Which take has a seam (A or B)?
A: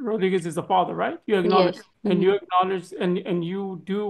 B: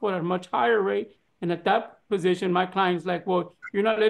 A